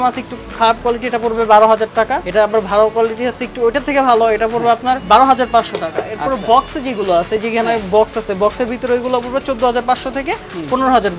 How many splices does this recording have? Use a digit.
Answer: 0